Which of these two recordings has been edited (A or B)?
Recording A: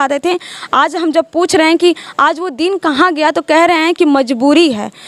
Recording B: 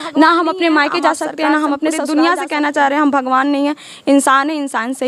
B